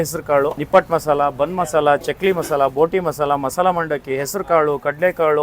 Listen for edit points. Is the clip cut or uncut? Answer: uncut